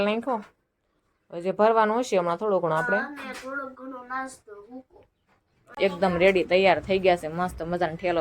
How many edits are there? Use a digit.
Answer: 1